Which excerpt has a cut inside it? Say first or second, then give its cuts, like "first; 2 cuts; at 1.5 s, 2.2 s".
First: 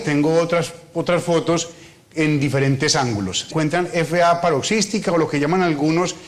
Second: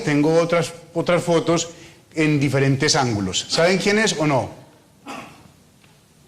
second; 1 cut; at 3.5 s